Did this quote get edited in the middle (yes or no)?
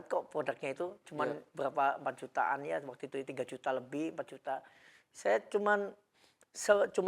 no